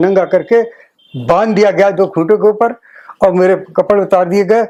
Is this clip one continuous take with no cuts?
yes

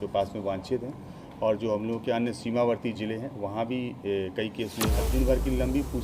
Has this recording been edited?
yes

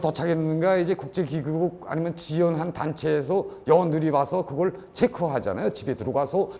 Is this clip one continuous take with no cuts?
yes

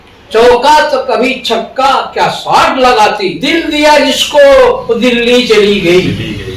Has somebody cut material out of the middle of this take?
yes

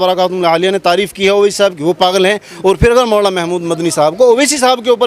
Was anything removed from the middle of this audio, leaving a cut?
no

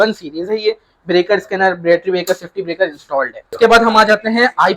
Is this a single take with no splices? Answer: no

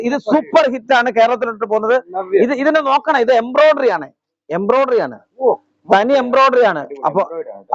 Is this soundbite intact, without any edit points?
yes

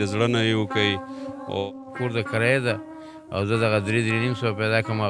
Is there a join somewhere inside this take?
yes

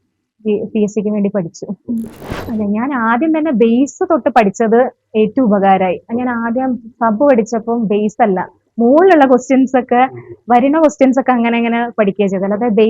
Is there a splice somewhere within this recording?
yes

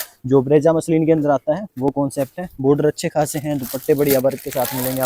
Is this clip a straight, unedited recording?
yes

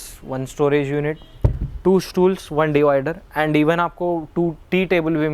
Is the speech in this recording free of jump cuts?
yes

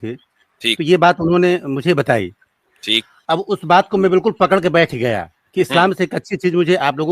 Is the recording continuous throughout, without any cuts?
no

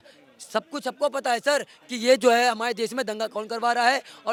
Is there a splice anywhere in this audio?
no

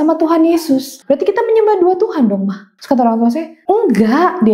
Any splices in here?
yes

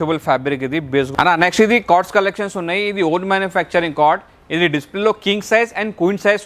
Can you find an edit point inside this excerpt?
yes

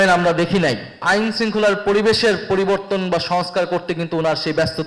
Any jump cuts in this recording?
yes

